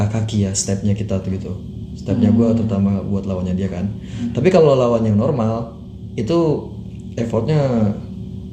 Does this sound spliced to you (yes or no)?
no